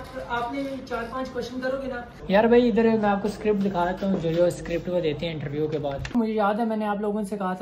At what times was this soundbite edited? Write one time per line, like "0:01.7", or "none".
0:02.1
0:06.1